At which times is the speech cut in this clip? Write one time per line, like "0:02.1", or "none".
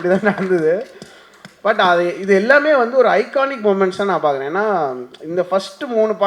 none